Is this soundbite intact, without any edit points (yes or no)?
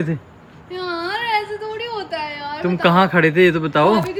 yes